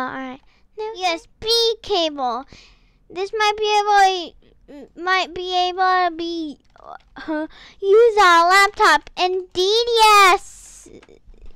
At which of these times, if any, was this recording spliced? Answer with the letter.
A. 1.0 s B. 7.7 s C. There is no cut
A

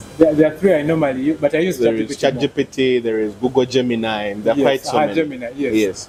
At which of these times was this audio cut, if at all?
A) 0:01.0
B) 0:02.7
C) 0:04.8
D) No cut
D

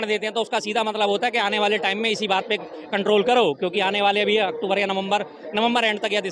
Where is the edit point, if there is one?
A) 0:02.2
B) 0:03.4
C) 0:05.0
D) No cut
D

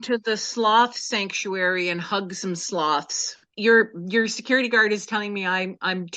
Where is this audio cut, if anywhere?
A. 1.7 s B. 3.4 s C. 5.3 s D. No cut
B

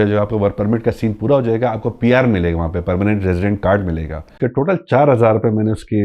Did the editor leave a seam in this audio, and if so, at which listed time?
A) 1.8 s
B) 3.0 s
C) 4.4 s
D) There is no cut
C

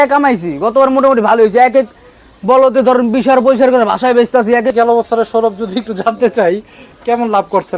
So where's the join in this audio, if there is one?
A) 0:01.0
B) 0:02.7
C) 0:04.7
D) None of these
C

